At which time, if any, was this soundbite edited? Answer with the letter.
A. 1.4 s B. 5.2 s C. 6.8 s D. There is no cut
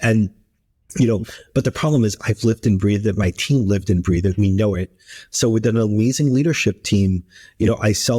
D